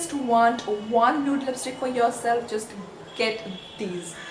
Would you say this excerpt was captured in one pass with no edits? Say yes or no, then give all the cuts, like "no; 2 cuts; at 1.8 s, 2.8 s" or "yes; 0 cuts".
yes; 0 cuts